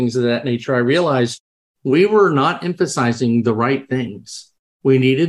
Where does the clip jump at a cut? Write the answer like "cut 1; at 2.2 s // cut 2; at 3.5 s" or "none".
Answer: none

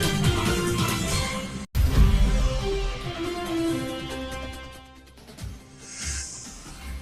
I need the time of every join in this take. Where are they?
none

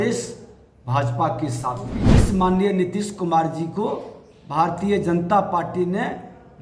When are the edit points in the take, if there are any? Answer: cut 1; at 2.0 s

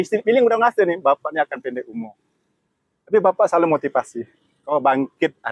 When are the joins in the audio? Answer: none

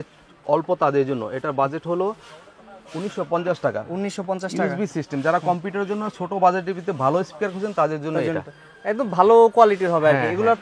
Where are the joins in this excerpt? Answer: none

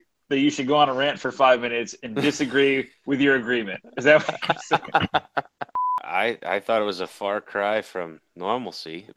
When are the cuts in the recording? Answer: cut 1; at 5.9 s

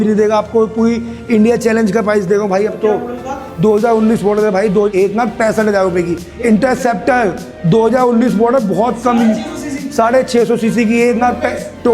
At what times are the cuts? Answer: cut 1; at 4.9 s

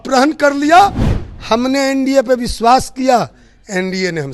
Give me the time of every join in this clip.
cut 1; at 1.1 s

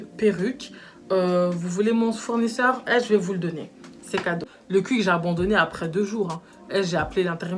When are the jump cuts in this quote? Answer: cut 1; at 4.5 s

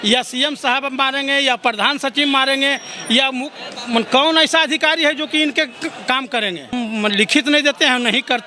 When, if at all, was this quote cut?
cut 1; at 6.7 s

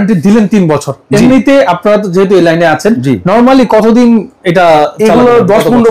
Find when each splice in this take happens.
none

